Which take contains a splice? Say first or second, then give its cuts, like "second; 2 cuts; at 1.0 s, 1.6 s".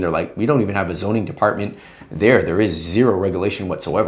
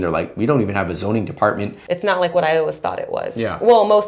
second; 1 cut; at 1.8 s